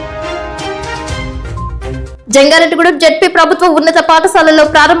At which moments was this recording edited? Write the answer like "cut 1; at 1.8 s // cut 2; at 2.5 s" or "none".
cut 1; at 1.3 s